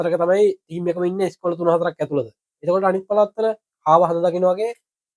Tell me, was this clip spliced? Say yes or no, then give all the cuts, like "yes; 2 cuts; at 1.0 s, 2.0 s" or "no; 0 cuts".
no; 0 cuts